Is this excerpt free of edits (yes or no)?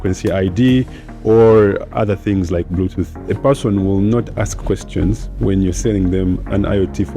no